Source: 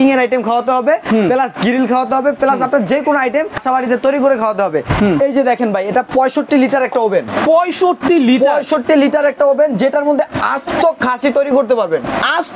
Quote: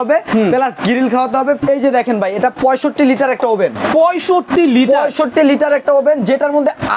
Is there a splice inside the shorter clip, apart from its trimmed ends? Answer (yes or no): yes